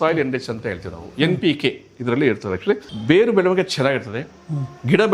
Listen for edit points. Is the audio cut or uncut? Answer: cut